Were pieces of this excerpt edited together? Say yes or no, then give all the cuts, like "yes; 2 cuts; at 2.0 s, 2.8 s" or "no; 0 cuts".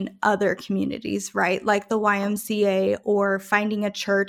no; 0 cuts